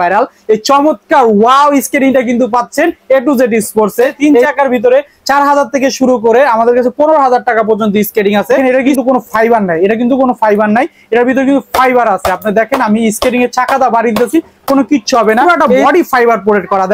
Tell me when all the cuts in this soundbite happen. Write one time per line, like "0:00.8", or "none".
0:04.1
0:08.6
0:15.6

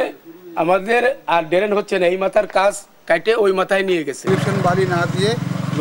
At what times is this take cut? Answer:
0:04.3

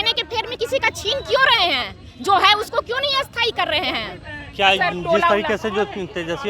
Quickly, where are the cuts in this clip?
none

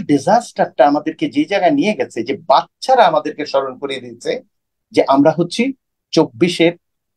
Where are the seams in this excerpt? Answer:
none

